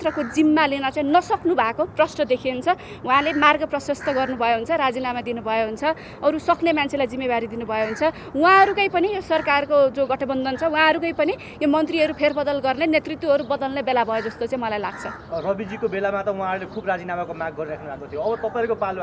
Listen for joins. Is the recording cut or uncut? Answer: uncut